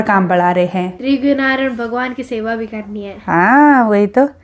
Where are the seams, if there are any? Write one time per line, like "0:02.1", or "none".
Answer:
0:01.0